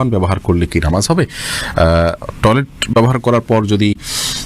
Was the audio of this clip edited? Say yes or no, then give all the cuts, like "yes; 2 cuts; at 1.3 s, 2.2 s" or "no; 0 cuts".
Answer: no; 0 cuts